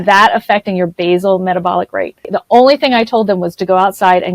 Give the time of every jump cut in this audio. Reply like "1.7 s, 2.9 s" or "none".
2.3 s